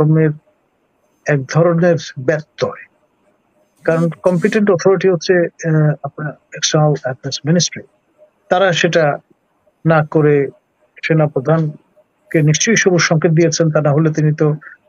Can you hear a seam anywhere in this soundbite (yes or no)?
no